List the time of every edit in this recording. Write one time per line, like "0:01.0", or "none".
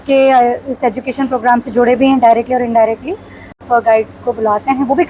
0:03.6